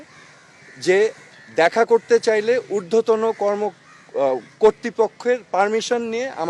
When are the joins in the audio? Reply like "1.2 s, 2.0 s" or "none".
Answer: none